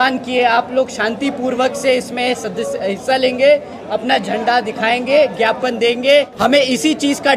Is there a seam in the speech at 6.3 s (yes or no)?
yes